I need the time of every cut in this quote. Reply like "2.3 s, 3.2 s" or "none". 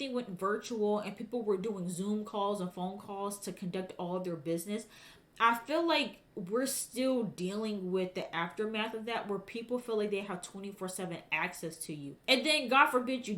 12.1 s